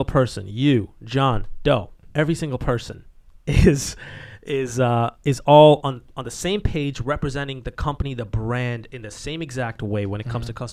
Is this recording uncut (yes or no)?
yes